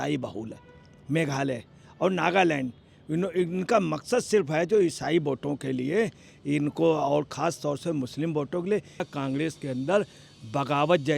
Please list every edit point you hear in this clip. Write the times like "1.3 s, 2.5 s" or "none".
9.0 s